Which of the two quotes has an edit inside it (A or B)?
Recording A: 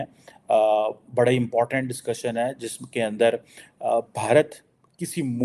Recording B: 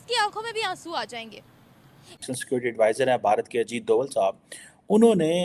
B